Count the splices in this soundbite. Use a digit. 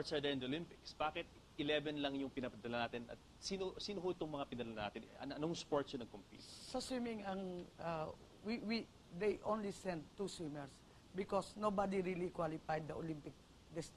0